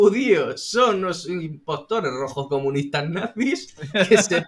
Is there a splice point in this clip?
no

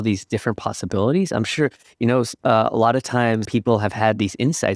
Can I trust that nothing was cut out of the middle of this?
no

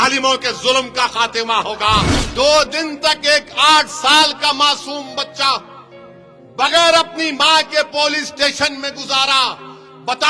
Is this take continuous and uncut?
no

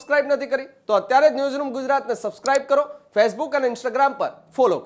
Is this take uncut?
yes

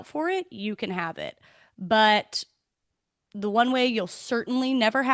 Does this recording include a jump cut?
no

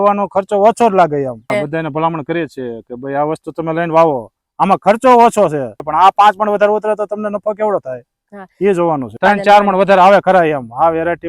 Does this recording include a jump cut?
yes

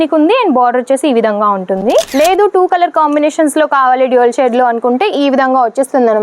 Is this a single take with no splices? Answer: no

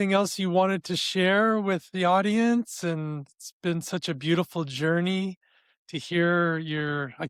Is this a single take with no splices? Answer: yes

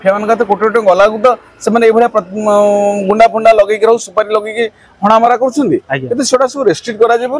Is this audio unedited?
yes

